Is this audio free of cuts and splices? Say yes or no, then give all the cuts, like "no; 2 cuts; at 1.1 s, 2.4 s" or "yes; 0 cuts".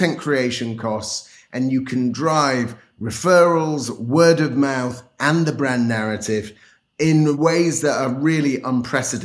no; 1 cut; at 7.4 s